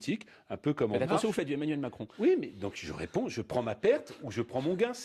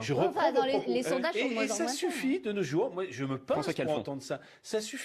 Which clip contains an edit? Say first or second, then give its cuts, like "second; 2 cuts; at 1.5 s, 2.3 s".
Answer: first; 1 cut; at 1.1 s